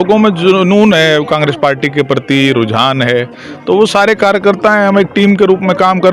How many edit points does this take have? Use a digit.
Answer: 0